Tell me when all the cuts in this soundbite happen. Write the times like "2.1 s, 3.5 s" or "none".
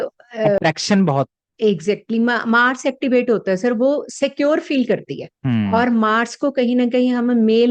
none